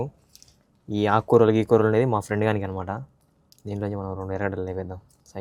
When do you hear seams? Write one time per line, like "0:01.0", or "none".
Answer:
none